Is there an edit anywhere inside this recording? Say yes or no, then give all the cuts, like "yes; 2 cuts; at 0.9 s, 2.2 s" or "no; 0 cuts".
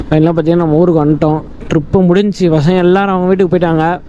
no; 0 cuts